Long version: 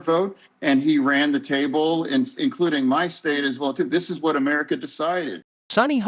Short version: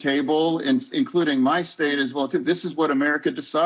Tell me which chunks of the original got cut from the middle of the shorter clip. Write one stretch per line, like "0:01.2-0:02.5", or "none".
none